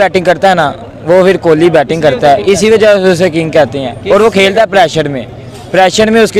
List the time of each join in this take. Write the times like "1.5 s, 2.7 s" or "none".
none